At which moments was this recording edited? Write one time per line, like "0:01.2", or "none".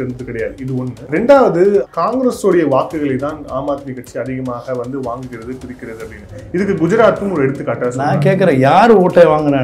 0:01.0
0:01.9